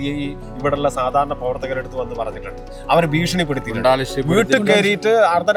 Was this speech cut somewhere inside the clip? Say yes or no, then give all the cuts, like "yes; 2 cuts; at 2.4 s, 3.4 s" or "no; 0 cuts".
no; 0 cuts